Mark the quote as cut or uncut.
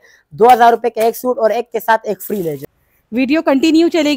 cut